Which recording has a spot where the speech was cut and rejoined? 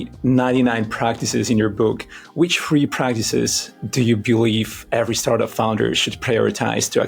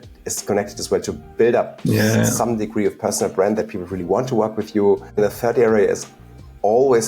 second; 1 cut; at 5.2 s

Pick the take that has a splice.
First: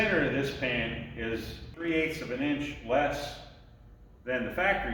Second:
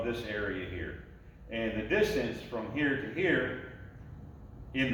first; 1 cut; at 1.8 s

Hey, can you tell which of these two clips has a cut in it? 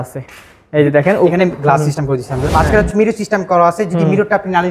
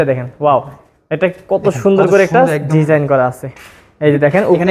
first; 1 cut; at 2.4 s

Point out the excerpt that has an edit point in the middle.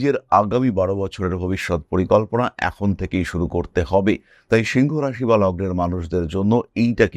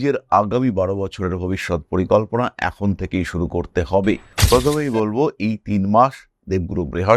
second; 1 cut; at 4.3 s

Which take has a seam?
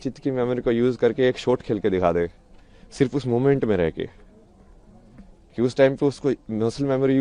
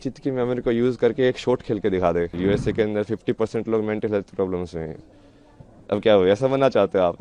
second; 1 cut; at 2.3 s

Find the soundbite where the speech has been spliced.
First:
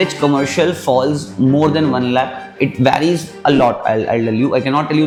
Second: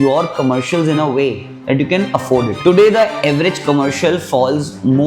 second; 1 cut; at 2.5 s

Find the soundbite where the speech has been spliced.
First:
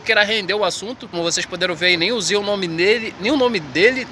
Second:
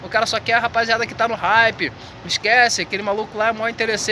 first; 1 cut; at 1.1 s

